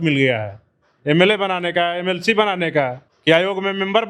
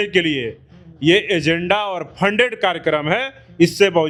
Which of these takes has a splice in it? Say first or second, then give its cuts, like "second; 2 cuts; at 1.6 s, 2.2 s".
first; 1 cut; at 3.1 s